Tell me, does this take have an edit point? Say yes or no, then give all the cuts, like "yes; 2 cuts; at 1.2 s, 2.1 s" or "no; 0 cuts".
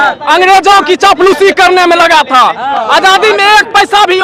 no; 0 cuts